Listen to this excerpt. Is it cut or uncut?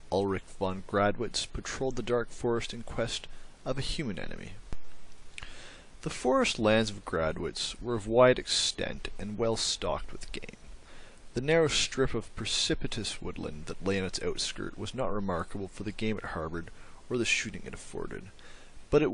uncut